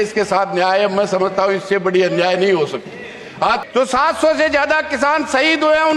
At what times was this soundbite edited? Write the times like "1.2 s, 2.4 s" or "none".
3.6 s

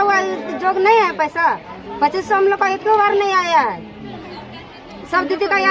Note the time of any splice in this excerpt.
none

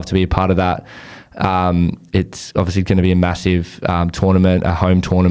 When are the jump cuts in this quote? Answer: none

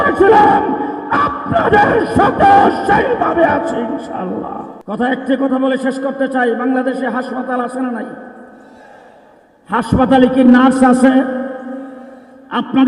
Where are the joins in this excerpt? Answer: 4.7 s

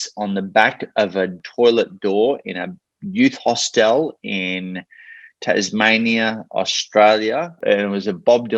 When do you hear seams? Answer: 1.3 s, 7.6 s

